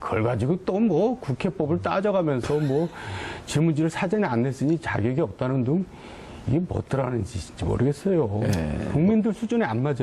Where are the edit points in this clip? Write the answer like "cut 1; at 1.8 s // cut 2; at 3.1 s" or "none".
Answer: cut 1; at 5.1 s